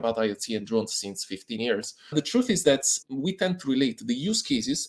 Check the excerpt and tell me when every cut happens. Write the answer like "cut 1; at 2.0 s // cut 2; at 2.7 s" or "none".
cut 1; at 2.1 s

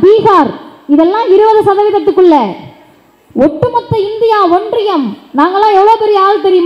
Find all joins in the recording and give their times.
none

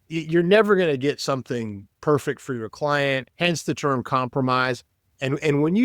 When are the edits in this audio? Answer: cut 1; at 3.3 s

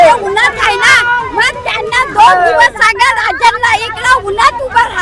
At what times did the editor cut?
none

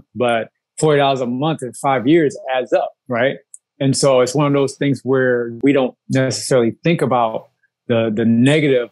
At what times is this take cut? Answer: cut 1; at 5.5 s

